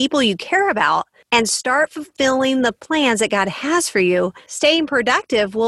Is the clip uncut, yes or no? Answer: no